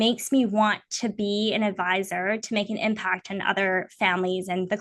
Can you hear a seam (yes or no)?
no